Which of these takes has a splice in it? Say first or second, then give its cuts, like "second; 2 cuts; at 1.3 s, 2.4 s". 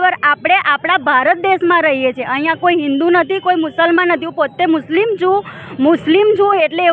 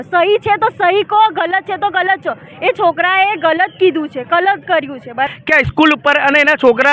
second; 1 cut; at 5.3 s